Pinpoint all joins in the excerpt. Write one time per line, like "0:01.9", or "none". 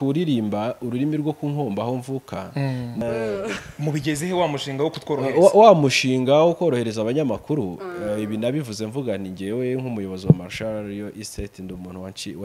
0:03.0

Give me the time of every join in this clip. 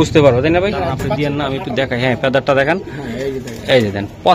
0:01.1

